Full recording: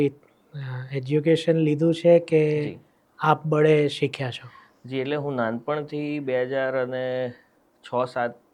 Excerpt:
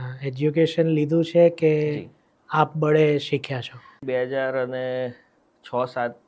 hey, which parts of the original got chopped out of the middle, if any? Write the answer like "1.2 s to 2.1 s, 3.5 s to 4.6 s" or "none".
4.7 s to 6.2 s